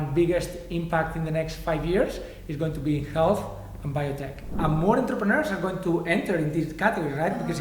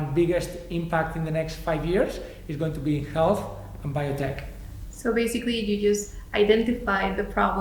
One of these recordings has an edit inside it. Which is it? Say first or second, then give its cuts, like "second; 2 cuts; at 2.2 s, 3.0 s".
first; 1 cut; at 4.4 s